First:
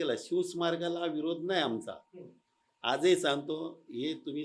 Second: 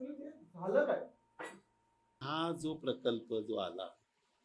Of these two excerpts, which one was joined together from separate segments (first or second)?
second